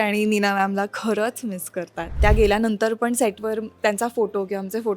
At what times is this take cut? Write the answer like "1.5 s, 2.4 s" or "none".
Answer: 2.2 s

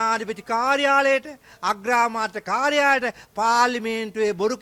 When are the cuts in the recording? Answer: none

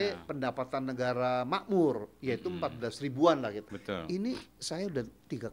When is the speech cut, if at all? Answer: 3.7 s

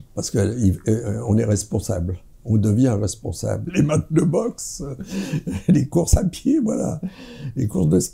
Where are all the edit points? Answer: 3.6 s

